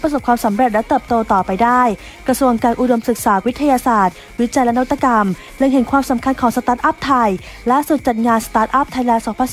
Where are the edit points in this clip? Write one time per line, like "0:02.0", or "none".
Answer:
none